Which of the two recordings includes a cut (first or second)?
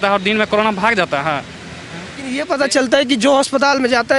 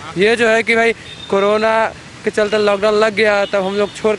first